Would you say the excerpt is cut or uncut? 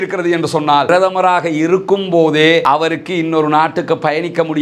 uncut